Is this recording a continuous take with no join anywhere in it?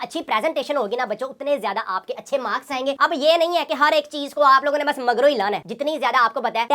yes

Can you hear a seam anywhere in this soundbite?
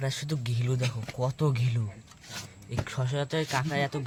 no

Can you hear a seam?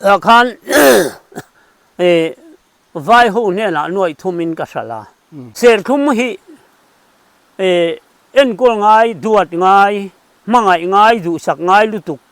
yes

